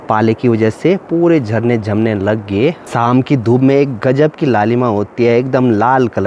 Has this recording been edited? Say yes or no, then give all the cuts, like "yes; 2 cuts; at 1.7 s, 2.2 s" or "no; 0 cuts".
yes; 1 cut; at 2.8 s